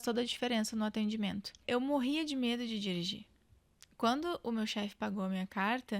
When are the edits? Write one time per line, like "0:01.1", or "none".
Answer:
0:01.6